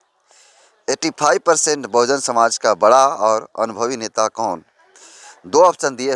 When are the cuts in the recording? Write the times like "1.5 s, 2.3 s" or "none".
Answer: none